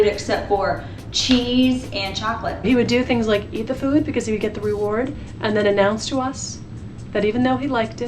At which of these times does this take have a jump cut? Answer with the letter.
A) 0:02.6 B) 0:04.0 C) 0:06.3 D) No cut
A